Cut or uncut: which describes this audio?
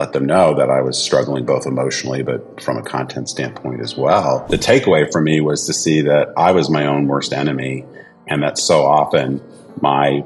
cut